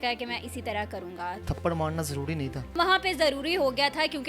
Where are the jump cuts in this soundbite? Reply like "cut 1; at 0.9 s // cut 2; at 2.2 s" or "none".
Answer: cut 1; at 1.4 s // cut 2; at 2.8 s